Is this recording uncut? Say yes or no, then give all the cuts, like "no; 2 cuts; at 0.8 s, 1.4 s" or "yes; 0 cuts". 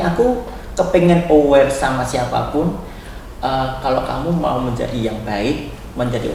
yes; 0 cuts